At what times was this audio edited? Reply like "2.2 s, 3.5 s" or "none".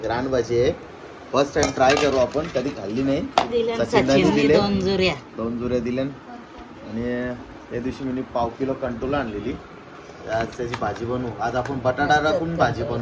none